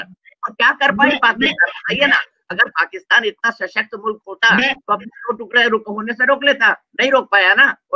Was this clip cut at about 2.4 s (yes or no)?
no